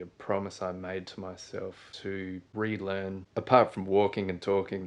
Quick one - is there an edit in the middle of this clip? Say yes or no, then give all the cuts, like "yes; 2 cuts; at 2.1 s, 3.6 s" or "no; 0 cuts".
yes; 2 cuts; at 1.9 s, 3.2 s